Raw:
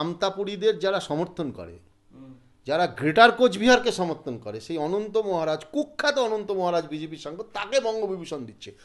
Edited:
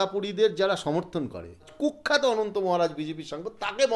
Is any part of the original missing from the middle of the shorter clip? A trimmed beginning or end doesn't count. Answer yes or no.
yes